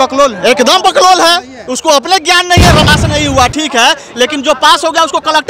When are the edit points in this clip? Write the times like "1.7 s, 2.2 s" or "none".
2.9 s